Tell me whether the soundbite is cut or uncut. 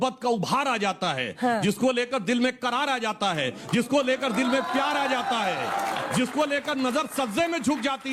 uncut